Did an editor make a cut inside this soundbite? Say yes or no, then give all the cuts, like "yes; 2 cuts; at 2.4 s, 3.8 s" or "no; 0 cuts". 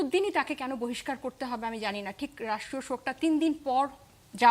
no; 0 cuts